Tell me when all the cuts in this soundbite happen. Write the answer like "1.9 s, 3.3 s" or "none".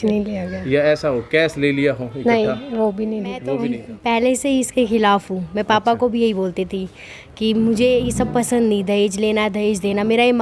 3.8 s